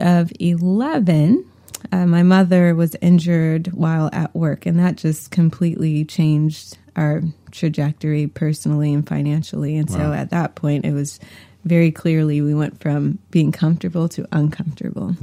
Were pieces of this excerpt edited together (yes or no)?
no